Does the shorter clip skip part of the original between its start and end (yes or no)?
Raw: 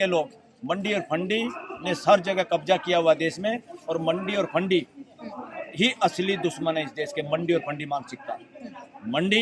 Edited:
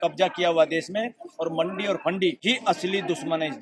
yes